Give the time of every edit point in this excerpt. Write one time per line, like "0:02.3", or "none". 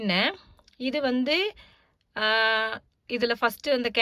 none